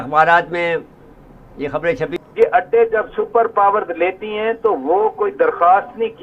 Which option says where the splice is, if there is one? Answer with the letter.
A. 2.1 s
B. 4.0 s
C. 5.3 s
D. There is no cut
A